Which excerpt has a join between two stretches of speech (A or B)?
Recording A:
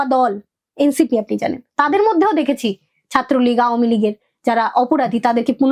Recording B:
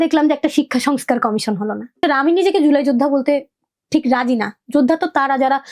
B